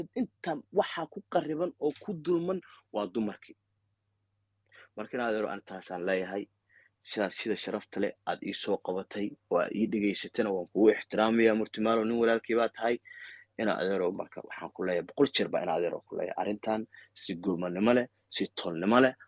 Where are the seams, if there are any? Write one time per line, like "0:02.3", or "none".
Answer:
none